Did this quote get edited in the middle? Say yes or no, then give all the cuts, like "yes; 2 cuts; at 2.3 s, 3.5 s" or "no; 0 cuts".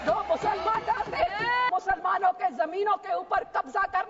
yes; 1 cut; at 1.7 s